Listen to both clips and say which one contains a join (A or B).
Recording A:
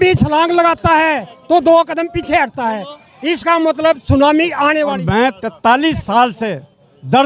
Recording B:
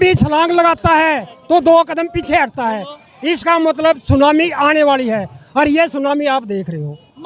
A